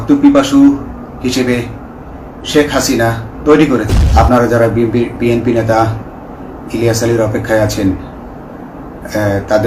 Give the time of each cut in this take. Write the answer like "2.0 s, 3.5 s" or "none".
4.0 s